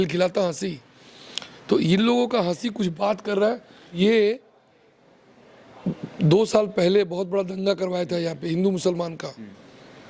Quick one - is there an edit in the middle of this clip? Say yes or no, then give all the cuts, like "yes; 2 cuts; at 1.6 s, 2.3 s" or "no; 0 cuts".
yes; 1 cut; at 3.9 s